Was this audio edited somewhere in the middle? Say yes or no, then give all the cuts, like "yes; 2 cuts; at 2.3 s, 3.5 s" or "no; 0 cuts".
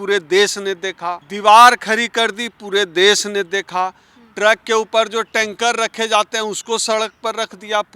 yes; 1 cut; at 1.3 s